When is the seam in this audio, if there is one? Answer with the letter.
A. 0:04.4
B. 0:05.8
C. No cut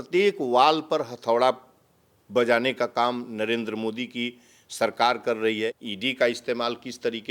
B